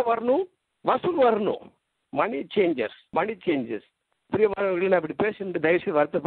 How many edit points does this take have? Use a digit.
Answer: 1